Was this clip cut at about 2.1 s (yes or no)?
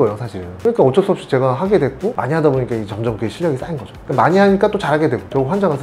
yes